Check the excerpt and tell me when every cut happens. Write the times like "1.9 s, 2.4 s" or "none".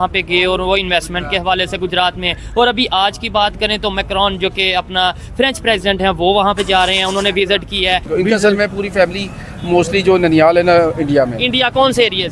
8.1 s